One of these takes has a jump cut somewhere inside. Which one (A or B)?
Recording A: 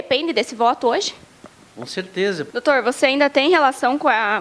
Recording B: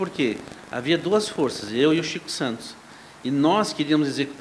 A